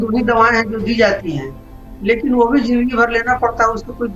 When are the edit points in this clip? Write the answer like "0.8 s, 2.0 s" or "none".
none